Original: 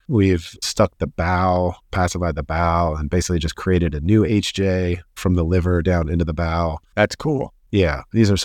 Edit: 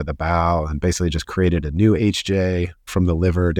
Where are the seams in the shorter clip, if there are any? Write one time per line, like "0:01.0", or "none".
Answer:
none